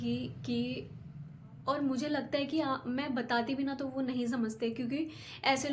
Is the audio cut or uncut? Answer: uncut